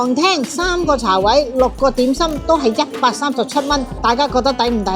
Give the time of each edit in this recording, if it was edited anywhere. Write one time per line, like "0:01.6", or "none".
0:03.9